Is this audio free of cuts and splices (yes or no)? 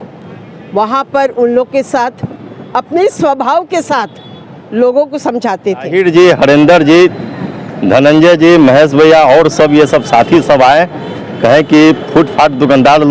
no